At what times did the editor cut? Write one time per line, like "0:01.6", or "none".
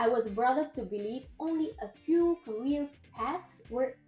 none